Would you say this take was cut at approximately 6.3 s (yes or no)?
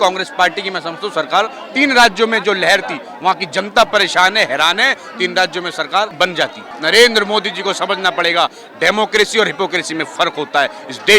yes